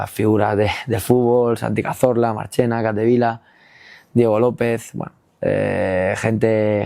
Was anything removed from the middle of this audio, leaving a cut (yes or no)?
no